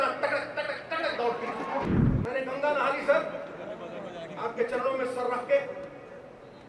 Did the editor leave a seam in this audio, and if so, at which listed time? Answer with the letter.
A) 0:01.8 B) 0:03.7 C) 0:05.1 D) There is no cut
A